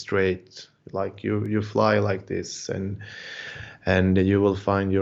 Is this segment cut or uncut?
uncut